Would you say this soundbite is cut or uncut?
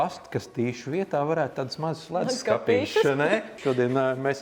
cut